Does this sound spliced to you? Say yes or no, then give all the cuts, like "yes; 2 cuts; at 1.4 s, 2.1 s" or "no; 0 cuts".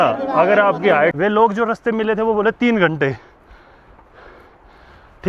yes; 1 cut; at 1.1 s